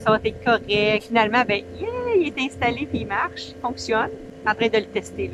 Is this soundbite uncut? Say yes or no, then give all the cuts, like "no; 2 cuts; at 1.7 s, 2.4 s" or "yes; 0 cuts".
no; 2 cuts; at 1.0 s, 4.3 s